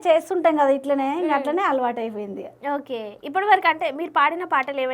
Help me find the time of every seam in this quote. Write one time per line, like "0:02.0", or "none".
none